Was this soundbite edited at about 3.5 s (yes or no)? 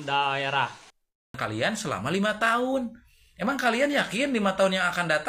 no